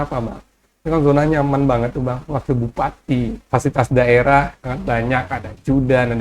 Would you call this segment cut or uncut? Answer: cut